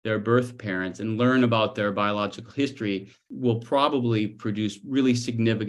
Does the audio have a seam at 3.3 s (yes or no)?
yes